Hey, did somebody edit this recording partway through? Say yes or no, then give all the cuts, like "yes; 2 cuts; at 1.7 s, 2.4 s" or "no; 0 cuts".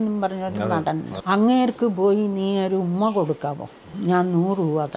yes; 2 cuts; at 1.1 s, 3.9 s